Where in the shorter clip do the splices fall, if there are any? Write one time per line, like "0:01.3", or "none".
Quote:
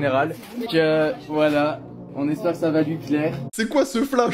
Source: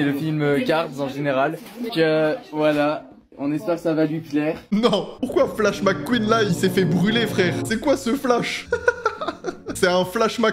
0:03.4